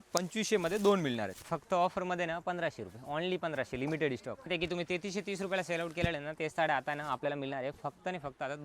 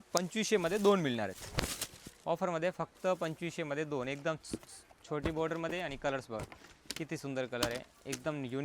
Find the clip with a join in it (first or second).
first